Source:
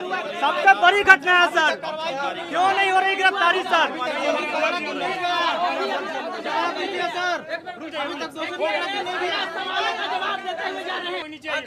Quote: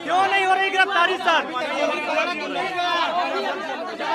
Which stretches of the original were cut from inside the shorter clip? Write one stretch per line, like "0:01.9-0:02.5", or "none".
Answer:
none

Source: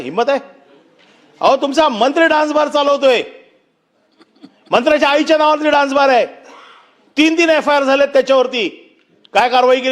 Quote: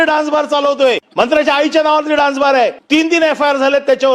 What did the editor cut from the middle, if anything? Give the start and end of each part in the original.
0:03.3-0:04.6
0:06.3-0:07.1

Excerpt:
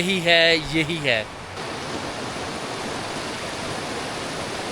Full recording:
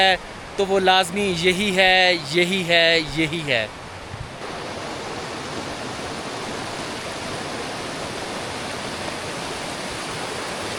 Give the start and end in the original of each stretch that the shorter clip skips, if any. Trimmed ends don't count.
0:04.0-0:05.2

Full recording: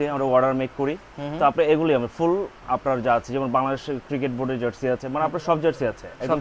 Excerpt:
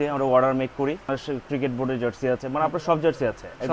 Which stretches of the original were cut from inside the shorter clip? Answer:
0:01.1-0:03.7

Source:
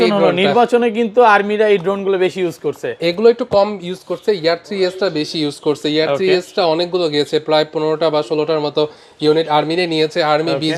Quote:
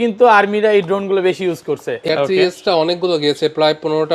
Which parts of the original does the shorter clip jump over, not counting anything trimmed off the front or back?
0:03.1-0:06.0

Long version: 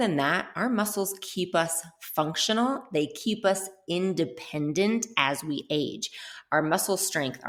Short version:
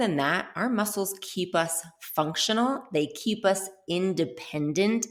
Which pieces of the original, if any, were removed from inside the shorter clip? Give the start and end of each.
none

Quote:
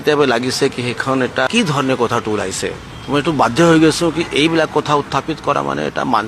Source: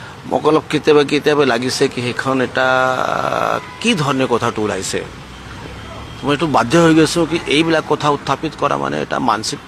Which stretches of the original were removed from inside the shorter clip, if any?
0:02.3-0:03.4
0:05.2-0:06.0

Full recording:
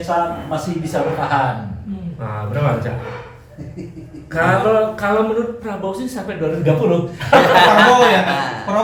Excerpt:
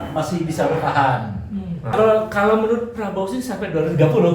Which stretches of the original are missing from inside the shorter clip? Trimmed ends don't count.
0:02.3-0:04.6

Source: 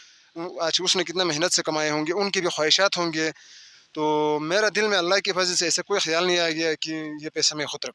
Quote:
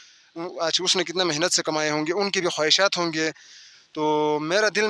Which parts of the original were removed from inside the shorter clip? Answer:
none

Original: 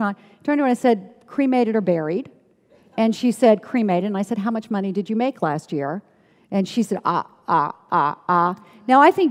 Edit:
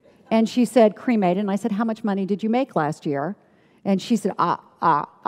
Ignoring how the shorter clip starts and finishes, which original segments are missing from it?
none

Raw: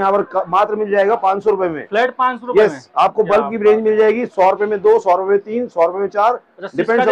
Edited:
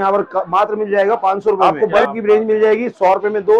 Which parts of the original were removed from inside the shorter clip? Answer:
0:01.6-0:03.0

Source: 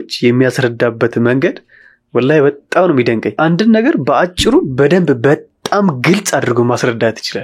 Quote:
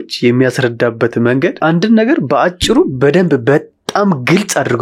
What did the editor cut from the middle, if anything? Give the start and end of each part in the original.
0:01.6-0:03.3

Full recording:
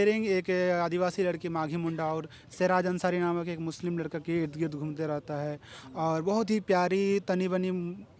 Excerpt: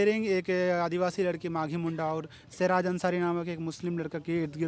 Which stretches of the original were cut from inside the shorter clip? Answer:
none

